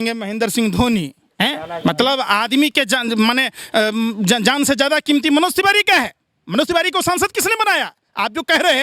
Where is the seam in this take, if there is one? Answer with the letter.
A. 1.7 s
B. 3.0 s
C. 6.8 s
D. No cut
A